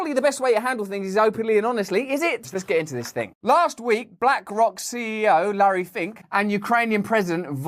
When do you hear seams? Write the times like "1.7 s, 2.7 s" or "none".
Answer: none